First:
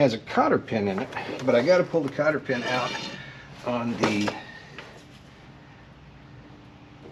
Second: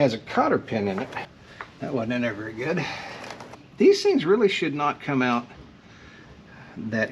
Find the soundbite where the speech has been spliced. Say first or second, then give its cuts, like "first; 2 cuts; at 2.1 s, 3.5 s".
second; 2 cuts; at 1.2 s, 3.6 s